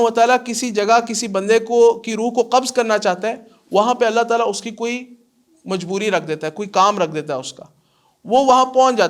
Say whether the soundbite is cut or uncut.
uncut